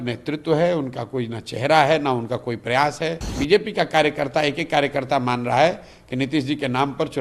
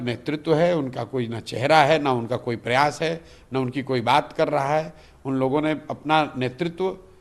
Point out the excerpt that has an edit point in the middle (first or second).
first